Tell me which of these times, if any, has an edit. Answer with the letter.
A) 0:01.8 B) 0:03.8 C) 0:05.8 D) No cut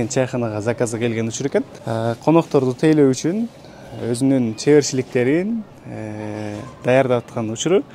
A